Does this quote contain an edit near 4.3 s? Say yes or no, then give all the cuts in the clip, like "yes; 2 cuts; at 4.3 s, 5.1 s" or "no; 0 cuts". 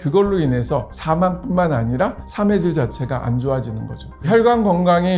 yes; 1 cut; at 4.3 s